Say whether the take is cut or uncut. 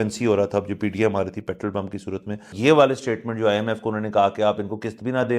cut